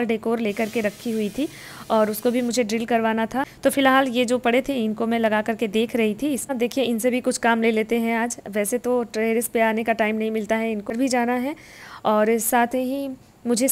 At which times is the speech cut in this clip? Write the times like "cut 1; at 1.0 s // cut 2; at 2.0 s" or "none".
cut 1; at 3.5 s // cut 2; at 6.5 s // cut 3; at 10.9 s